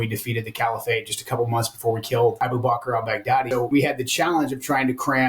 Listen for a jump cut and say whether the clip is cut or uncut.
cut